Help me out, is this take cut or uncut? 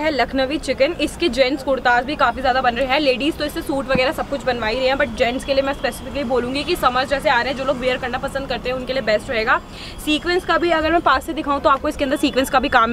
uncut